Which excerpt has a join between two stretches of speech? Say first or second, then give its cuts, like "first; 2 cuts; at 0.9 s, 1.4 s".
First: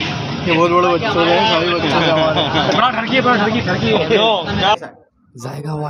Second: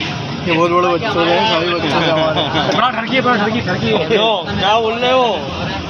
first; 1 cut; at 4.7 s